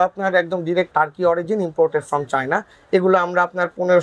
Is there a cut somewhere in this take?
yes; 1 cut; at 0.9 s

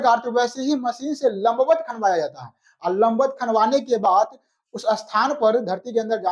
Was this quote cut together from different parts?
no; 0 cuts

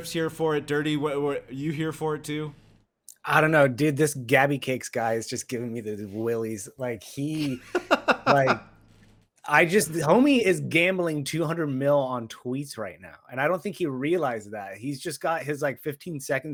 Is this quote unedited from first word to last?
yes; 0 cuts

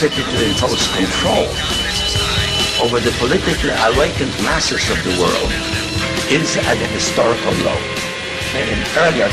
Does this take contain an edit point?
yes; 1 cut; at 1.2 s

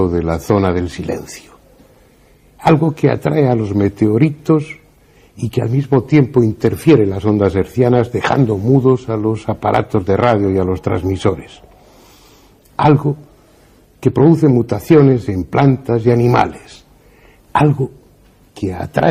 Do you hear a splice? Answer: no; 0 cuts

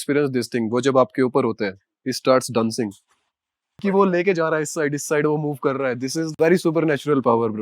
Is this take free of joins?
no; 2 cuts; at 3.9 s, 6.2 s

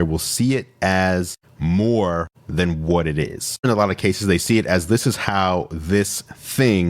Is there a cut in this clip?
yes; 1 cut; at 3.6 s

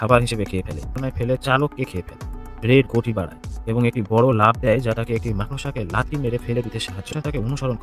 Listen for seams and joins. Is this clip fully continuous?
no; 2 cuts; at 1.0 s, 7.1 s

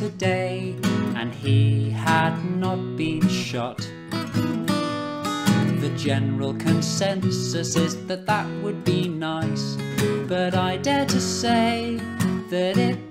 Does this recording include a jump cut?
no; 0 cuts

